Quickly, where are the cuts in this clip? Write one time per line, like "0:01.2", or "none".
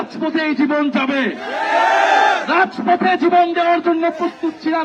none